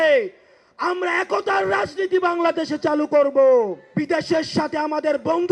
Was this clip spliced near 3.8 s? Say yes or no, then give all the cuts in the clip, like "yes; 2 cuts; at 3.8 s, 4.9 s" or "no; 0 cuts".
yes; 1 cut; at 3.8 s